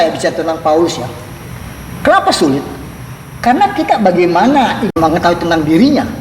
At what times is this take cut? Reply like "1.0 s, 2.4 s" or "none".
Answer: 4.9 s